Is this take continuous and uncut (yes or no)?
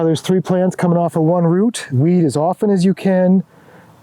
no